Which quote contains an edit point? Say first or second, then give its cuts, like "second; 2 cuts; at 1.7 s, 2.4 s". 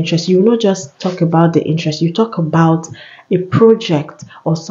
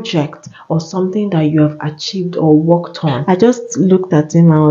second; 1 cut; at 3.3 s